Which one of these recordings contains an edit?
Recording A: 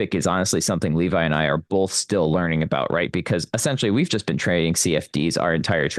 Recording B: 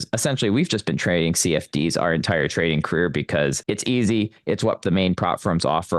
B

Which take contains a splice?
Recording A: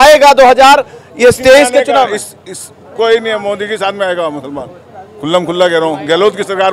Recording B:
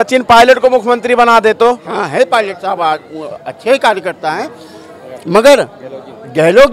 B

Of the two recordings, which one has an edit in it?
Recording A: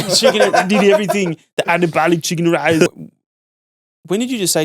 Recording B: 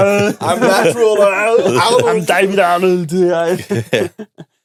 A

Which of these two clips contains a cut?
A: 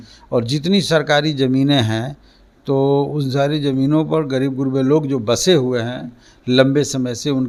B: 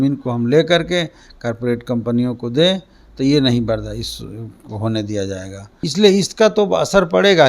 B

